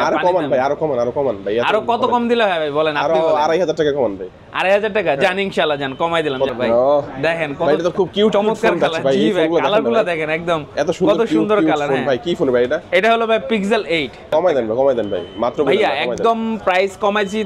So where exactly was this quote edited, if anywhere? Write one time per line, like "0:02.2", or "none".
0:06.5
0:14.3